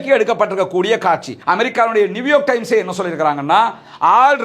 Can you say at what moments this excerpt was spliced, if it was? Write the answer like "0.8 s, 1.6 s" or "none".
1.3 s